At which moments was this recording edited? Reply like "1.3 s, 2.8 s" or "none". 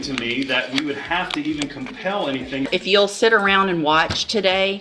2.7 s